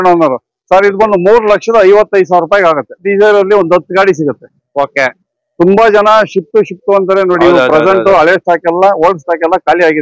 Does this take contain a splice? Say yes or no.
yes